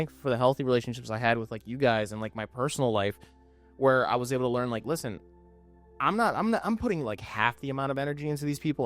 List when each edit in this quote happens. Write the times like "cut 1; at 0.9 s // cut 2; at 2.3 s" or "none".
none

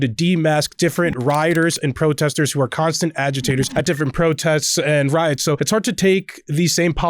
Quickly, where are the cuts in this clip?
cut 1; at 3.7 s // cut 2; at 5.6 s

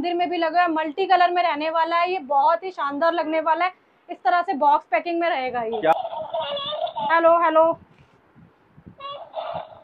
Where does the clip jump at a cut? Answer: cut 1; at 5.9 s

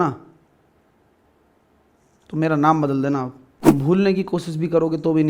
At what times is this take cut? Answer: cut 1; at 3.7 s

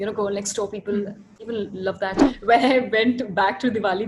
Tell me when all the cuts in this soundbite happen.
cut 1; at 2.2 s

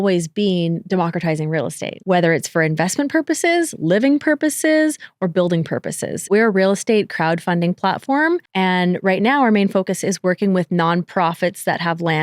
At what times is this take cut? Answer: cut 1; at 2.0 s // cut 2; at 6.3 s // cut 3; at 8.5 s

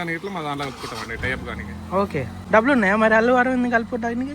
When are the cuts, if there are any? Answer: cut 1; at 2.4 s

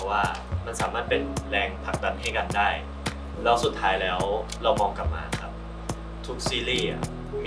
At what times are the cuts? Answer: none

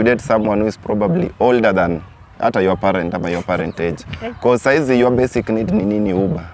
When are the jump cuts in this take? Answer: none

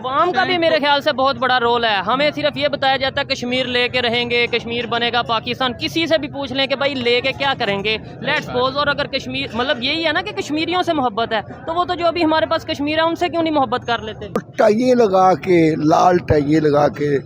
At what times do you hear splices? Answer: cut 1; at 14.5 s

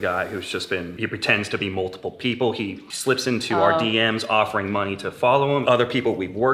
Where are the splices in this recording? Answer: cut 1; at 1.0 s // cut 2; at 2.8 s // cut 3; at 5.6 s

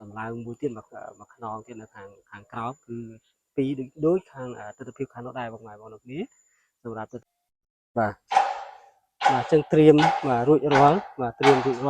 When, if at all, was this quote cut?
cut 1; at 7.3 s

